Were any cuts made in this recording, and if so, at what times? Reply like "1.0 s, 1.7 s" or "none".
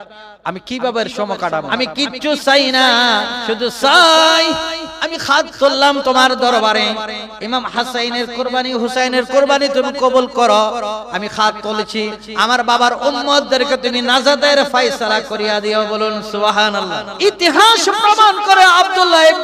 1.7 s, 17.0 s